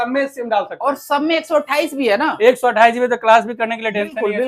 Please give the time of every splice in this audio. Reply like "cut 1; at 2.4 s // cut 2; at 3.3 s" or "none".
none